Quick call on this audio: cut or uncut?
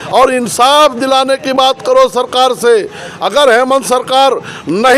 uncut